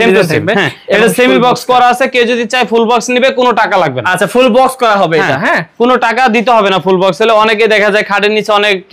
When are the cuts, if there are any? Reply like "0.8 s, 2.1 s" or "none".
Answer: none